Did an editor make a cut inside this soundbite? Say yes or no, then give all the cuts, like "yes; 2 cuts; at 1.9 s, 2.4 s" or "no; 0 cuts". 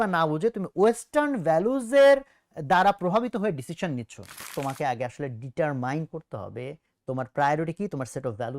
yes; 1 cut; at 4.3 s